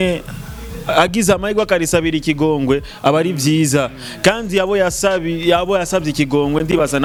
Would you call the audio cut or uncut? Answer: uncut